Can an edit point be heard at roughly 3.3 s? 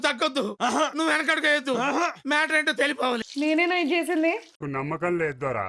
yes; 1 cut; at 3.3 s

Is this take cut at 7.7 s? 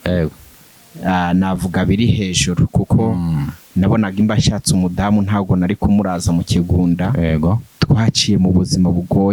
yes; 1 cut; at 7.7 s

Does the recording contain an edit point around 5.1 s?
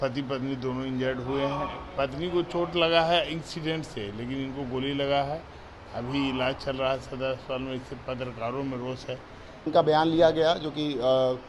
no; 1 cut; at 9.7 s

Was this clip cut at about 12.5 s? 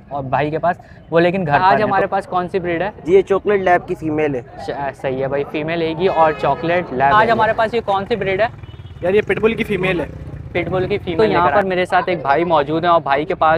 no; 3 cuts; at 1.6 s, 7.1 s, 11.2 s

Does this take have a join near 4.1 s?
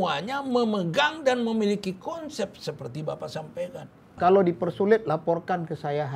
yes; 1 cut; at 4.1 s

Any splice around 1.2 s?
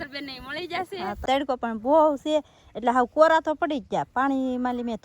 yes; 1 cut; at 1.2 s

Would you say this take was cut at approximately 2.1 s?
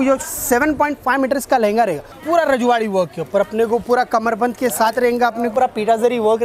yes; 2 cuts; at 2.1 s, 5.5 s

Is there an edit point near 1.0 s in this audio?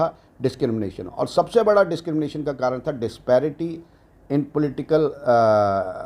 no; 0 cuts

